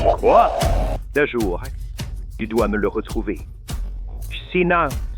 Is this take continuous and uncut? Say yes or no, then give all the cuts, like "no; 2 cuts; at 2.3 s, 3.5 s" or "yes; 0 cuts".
no; 1 cut; at 0.9 s